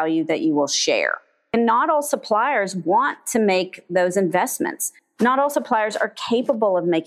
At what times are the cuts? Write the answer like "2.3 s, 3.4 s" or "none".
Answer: 1.5 s